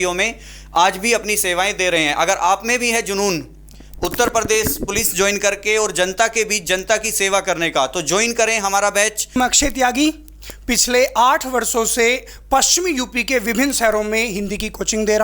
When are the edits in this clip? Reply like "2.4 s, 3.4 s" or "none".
9.4 s